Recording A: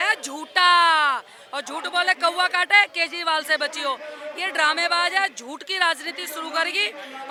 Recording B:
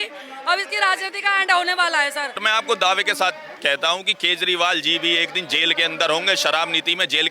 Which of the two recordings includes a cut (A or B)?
B